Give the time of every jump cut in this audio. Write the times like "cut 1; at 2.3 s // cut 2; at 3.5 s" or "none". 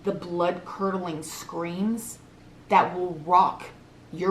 none